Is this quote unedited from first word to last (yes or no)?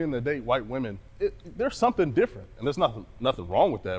no